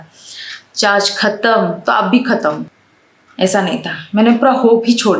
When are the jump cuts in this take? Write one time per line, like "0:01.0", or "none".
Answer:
0:02.7

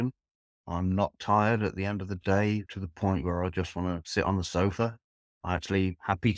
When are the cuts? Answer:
none

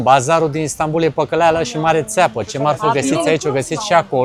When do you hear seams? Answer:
none

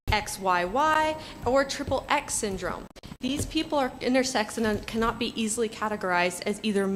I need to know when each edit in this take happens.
none

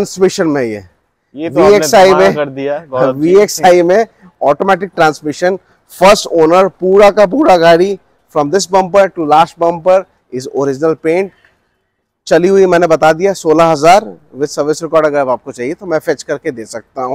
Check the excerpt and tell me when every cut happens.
none

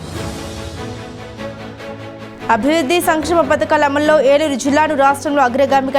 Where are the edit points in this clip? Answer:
none

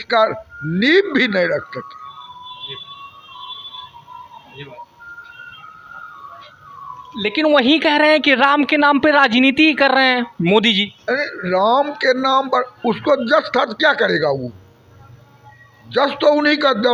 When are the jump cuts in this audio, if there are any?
none

